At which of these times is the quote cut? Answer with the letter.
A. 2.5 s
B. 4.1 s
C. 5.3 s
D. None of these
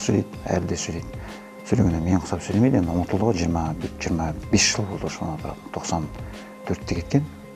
D